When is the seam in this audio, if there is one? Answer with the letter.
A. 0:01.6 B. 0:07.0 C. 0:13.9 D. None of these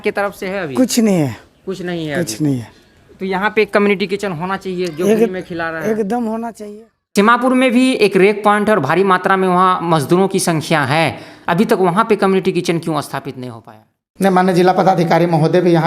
B